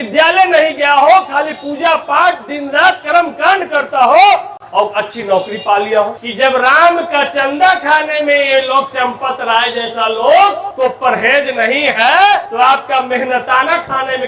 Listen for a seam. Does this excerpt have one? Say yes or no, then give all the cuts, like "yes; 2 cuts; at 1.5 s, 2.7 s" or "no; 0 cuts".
yes; 3 cuts; at 6.2 s, 10.7 s, 12.5 s